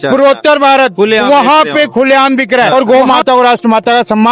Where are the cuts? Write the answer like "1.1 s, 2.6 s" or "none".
2.7 s